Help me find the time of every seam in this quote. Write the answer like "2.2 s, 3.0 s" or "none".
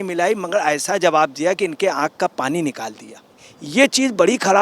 3.5 s